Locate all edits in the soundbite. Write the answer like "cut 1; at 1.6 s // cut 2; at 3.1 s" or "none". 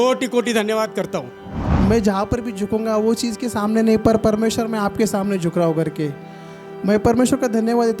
cut 1; at 1.6 s